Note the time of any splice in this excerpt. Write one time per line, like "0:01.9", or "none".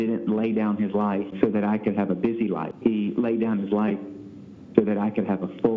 0:01.3
0:02.7